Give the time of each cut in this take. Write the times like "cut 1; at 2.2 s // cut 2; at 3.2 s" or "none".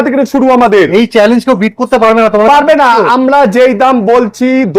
none